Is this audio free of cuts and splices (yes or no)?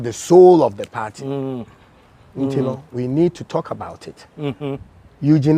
yes